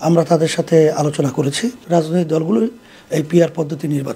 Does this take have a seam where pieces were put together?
yes; 1 cut; at 1.8 s

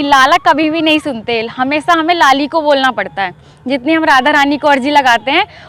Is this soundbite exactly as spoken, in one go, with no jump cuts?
yes; 0 cuts

